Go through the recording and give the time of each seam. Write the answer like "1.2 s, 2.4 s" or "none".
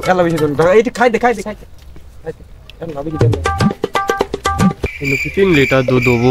4.8 s